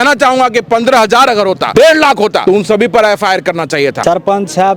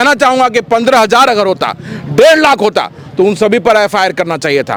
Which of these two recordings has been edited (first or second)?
first